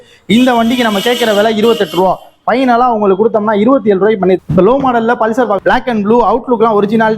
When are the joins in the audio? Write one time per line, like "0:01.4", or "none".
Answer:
0:04.4
0:05.6